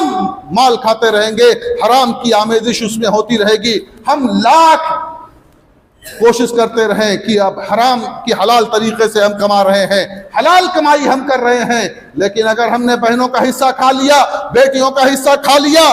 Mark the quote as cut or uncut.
uncut